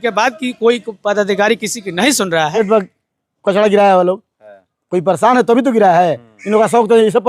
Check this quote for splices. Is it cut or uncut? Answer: cut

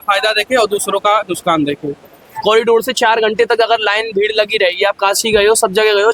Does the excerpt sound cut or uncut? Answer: cut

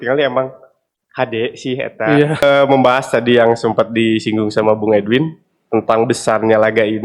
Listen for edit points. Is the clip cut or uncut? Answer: cut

